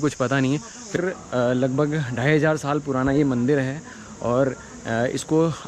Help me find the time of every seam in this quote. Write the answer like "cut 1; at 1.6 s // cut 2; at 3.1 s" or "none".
cut 1; at 1.0 s